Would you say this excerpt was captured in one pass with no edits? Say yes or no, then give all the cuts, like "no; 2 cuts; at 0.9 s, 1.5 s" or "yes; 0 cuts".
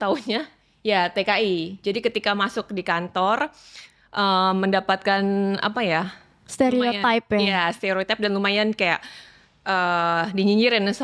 yes; 0 cuts